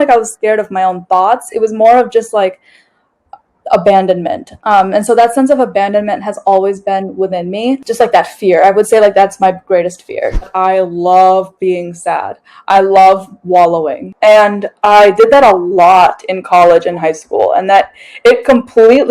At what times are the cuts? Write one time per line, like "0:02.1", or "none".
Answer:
0:10.5
0:14.0